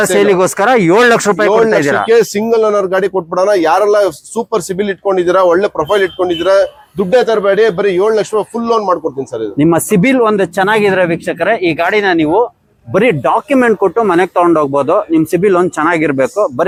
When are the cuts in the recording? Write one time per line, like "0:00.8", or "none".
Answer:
none